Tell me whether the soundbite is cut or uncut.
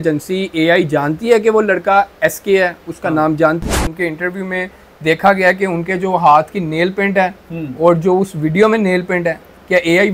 cut